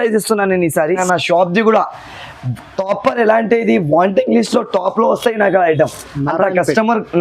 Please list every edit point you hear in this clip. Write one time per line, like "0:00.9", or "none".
0:01.0